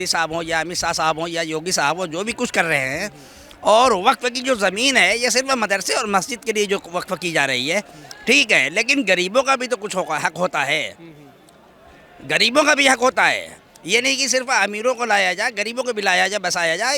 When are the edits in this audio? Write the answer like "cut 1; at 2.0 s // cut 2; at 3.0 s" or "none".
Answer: none